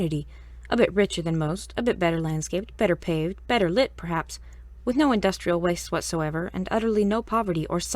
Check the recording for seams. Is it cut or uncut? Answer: cut